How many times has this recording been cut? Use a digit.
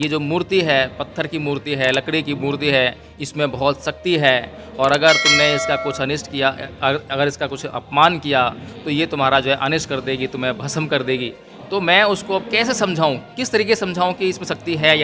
0